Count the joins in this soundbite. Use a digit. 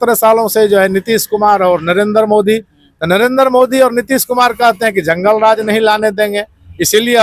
0